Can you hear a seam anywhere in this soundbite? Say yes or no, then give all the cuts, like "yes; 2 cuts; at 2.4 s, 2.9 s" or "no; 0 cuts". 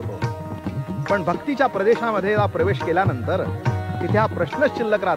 no; 0 cuts